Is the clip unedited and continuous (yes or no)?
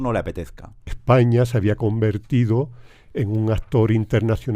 no